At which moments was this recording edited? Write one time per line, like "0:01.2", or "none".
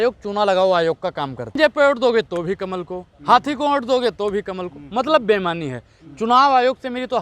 0:01.5